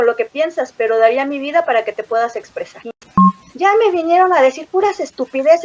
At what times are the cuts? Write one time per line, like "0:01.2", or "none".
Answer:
0:03.2